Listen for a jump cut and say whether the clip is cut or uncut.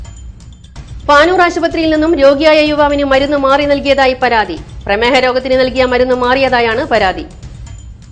uncut